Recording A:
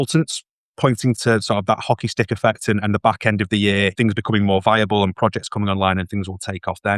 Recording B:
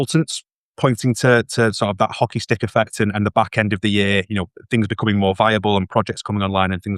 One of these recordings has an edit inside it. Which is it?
A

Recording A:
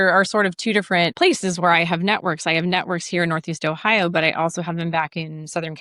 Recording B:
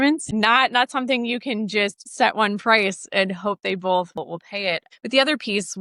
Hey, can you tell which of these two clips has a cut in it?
A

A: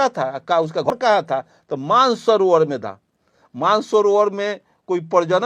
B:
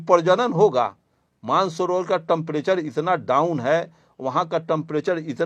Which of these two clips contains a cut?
A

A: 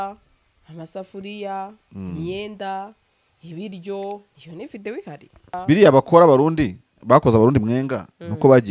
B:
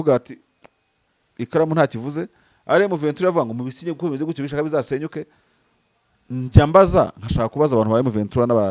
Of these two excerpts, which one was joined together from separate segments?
A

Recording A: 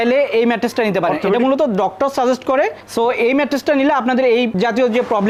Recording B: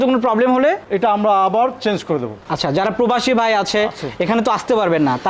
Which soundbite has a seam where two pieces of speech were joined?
B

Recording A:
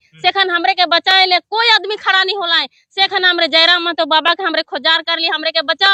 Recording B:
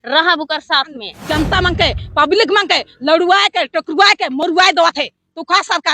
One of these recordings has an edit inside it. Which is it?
B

